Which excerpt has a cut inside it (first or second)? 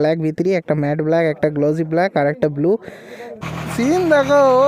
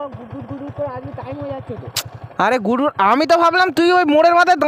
first